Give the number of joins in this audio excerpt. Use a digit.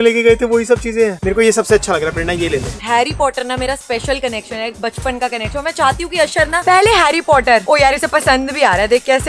2